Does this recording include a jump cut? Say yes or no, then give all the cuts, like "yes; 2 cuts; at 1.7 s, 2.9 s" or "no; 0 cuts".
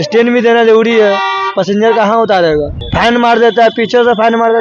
yes; 1 cut; at 2.8 s